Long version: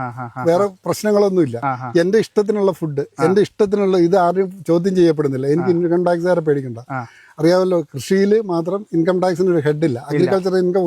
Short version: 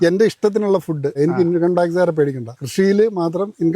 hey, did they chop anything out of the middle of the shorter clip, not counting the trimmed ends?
yes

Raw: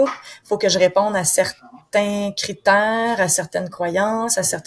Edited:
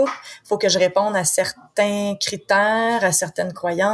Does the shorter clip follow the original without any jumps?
no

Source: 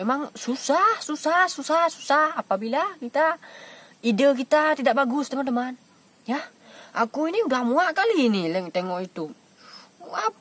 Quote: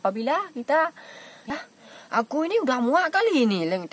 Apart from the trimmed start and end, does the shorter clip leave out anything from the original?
yes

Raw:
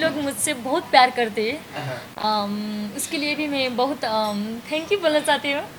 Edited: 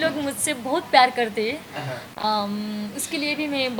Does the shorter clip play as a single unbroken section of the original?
yes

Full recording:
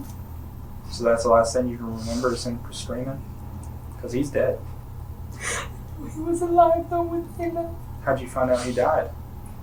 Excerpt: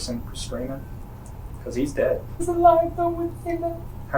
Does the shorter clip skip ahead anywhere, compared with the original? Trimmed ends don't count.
yes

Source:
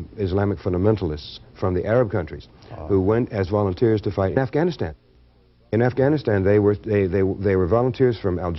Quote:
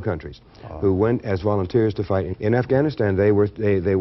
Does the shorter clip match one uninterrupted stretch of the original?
no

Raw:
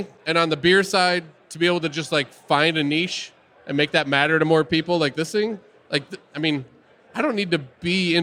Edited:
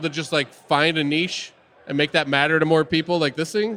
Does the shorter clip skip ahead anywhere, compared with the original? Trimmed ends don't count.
no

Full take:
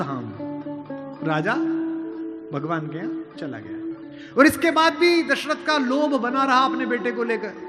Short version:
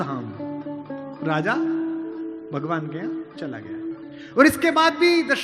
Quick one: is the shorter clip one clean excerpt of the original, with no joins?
yes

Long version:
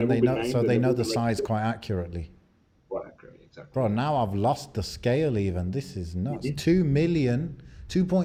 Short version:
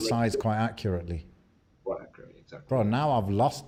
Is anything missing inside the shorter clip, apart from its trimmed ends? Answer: no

